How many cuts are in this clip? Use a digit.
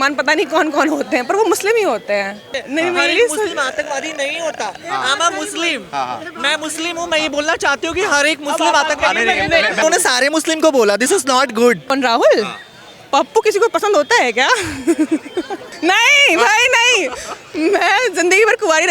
4